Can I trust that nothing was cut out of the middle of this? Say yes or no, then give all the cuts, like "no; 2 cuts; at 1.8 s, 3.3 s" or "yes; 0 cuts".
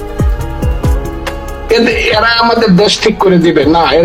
yes; 0 cuts